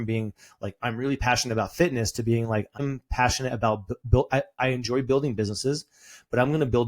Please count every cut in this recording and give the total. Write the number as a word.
two